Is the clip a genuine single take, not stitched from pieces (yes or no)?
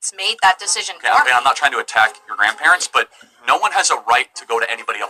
yes